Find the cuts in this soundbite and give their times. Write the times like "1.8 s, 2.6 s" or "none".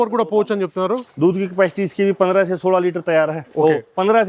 1.0 s